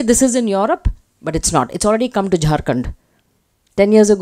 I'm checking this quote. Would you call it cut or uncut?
uncut